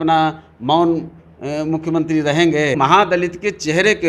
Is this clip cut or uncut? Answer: cut